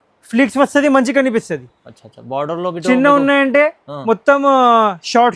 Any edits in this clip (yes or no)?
no